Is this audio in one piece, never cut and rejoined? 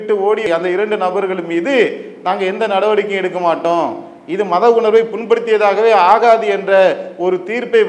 yes; 0 cuts

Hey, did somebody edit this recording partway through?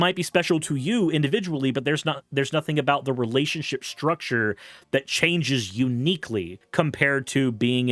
yes; 1 cut; at 6.6 s

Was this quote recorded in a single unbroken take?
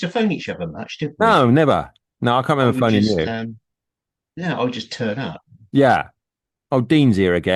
yes; 0 cuts

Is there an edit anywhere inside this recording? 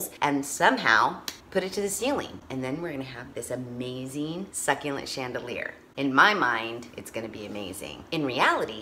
no; 0 cuts

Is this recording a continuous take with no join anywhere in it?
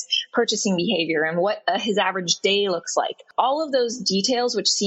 no; 1 cut; at 3.2 s

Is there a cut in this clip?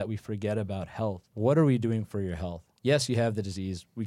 yes; 1 cut; at 1.3 s

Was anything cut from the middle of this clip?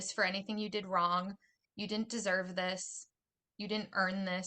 no; 0 cuts

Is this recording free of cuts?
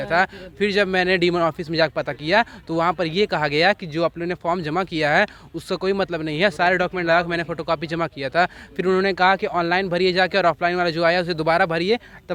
yes; 0 cuts

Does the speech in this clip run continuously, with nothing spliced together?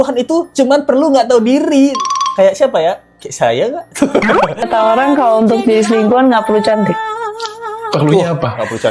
no; 1 cut; at 4.7 s

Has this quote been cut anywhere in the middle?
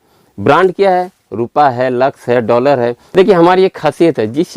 yes; 1 cut; at 3.0 s

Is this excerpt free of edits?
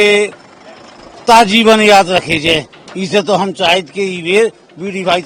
yes; 0 cuts

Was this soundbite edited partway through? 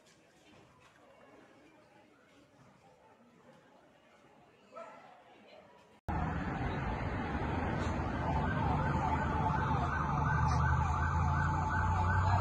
yes; 1 cut; at 6.0 s

